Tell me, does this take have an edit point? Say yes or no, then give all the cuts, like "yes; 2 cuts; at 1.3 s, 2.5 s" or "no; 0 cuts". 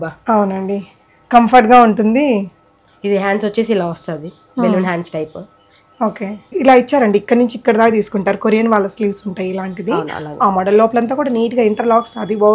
yes; 1 cut; at 6.5 s